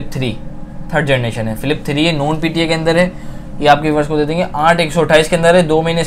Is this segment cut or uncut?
uncut